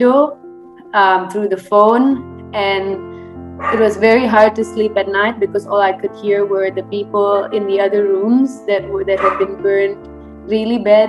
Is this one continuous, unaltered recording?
yes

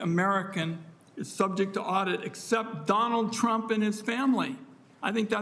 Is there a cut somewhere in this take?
no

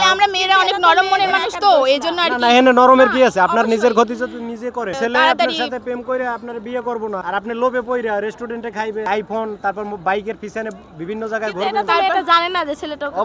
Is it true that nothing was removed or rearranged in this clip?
no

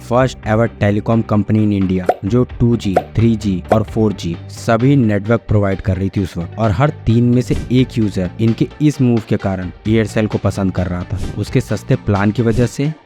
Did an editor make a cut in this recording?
no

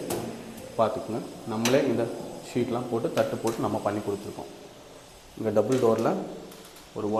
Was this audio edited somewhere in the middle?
no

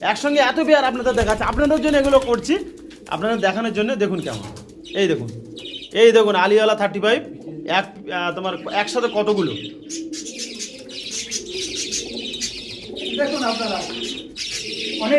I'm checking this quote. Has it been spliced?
no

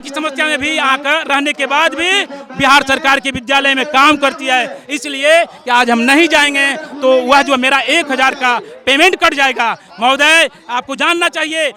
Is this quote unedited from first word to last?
yes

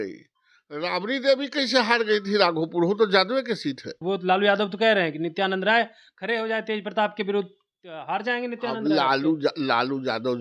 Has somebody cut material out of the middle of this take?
yes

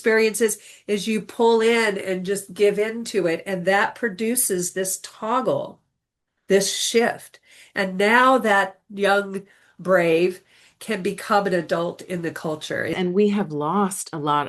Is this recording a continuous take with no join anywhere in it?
no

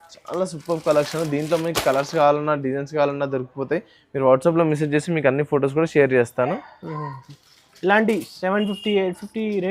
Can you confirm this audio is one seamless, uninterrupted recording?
yes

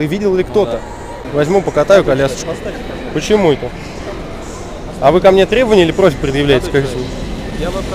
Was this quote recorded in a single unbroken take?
no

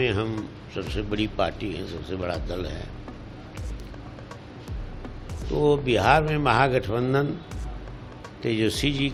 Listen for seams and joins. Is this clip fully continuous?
yes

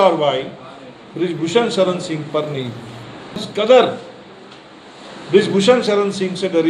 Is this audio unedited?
no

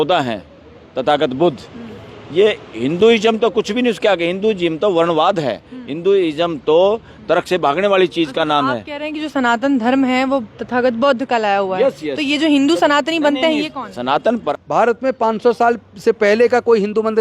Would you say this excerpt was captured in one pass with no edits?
no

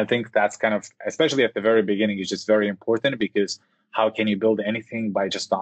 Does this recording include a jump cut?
no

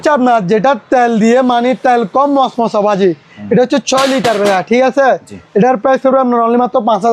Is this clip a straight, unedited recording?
yes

